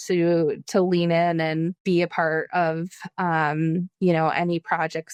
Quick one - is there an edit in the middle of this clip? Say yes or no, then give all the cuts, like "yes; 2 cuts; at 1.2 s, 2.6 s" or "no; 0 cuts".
no; 0 cuts